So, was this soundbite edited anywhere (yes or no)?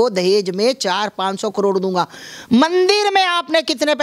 no